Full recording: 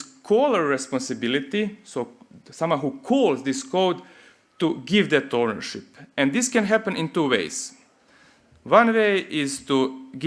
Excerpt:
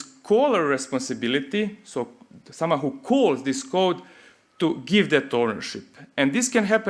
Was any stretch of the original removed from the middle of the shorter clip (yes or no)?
no